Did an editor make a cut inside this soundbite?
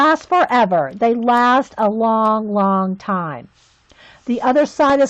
yes; 1 cut; at 3.5 s

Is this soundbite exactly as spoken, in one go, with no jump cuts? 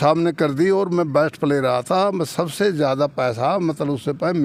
yes; 0 cuts

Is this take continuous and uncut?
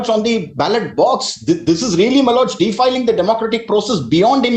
yes; 0 cuts

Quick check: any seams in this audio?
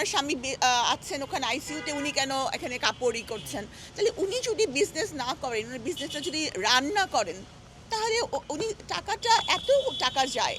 no; 0 cuts

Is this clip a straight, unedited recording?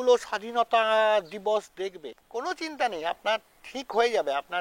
no; 1 cut; at 2.1 s

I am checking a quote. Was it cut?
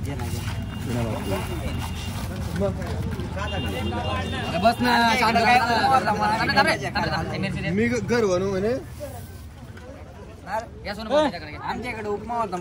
no; 0 cuts

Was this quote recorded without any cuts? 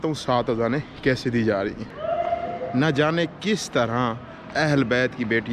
no; 1 cut; at 1.9 s

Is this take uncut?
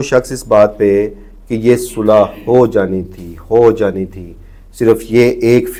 yes; 0 cuts

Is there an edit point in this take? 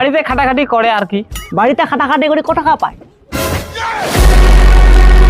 yes; 1 cut; at 1.4 s

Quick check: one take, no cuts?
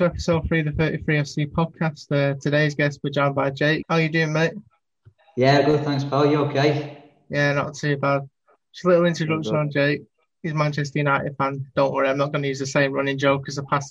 no; 1 cut; at 3.8 s

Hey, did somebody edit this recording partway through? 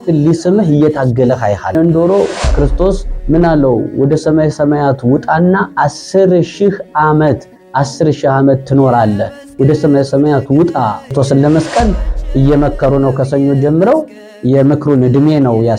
yes; 2 cuts; at 1.7 s, 11.1 s

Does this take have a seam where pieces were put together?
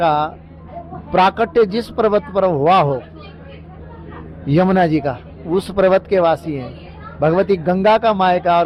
no; 0 cuts

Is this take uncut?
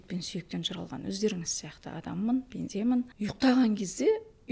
no; 1 cut; at 3.1 s

